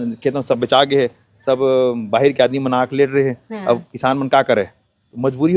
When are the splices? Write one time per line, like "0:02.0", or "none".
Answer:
none